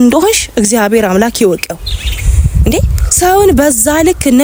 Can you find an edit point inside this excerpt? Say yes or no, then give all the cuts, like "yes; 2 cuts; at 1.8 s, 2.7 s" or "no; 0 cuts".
no; 0 cuts